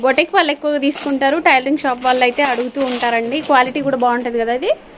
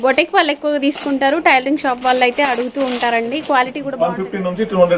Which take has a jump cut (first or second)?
second